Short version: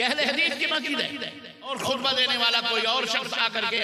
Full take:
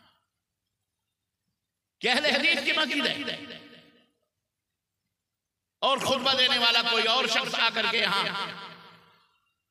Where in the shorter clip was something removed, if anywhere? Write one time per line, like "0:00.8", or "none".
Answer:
0:01.7